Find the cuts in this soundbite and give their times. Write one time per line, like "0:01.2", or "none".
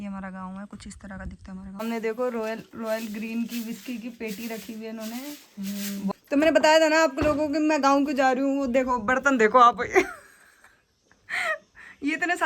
0:01.8
0:06.1